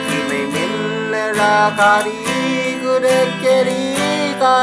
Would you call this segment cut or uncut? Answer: uncut